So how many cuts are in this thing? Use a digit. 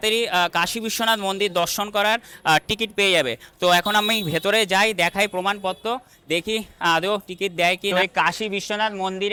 0